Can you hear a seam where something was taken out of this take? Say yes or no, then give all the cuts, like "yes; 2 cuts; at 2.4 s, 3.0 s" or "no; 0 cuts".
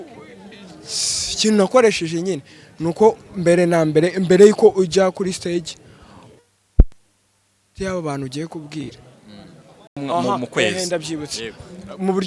yes; 1 cut; at 10.0 s